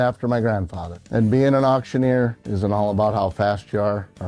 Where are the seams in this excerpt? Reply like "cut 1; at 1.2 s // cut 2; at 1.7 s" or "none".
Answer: none